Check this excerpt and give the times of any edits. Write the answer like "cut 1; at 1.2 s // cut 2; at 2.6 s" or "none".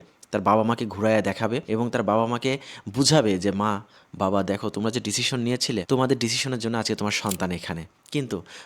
cut 1; at 5.8 s